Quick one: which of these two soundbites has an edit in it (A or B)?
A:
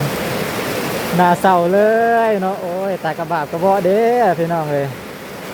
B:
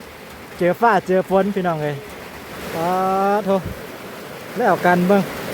B